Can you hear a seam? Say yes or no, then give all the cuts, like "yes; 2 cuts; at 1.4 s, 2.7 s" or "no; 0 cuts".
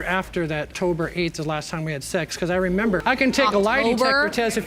no; 0 cuts